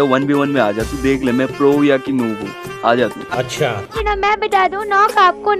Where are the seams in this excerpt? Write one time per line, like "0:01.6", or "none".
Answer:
0:03.9